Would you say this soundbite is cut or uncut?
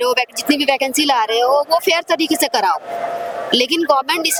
uncut